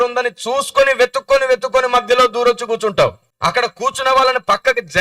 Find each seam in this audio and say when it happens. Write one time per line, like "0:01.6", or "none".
0:03.3